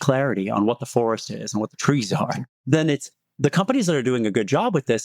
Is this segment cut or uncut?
cut